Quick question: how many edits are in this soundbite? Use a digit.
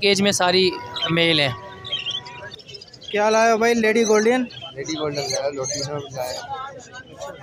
1